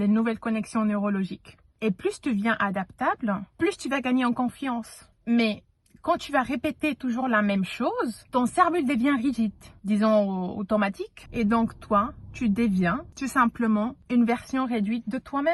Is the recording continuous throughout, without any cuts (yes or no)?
yes